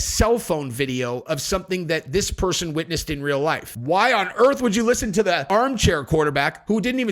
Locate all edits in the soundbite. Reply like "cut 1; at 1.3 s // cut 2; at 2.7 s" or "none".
cut 1; at 3.7 s // cut 2; at 5.4 s